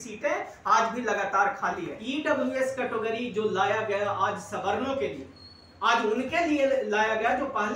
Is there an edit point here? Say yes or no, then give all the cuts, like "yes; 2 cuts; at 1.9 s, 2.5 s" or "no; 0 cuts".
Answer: yes; 1 cut; at 1.9 s